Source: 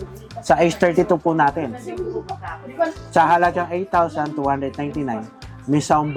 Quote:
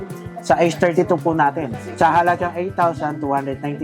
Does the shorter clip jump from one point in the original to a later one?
yes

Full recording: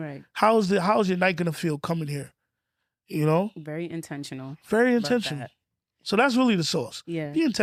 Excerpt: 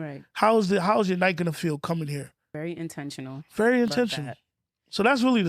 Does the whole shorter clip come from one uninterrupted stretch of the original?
no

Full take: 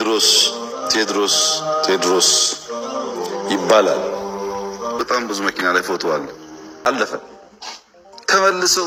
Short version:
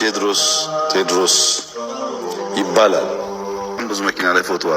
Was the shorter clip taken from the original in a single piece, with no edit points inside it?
no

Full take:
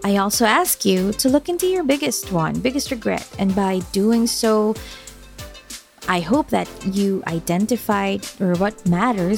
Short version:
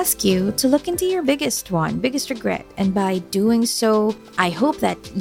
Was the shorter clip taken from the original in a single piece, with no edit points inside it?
no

